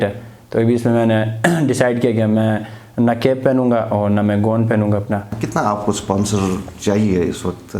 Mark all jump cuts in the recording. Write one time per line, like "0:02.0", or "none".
0:05.4